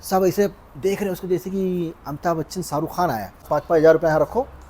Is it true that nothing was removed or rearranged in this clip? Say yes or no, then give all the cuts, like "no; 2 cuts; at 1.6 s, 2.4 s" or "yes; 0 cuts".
no; 1 cut; at 3.5 s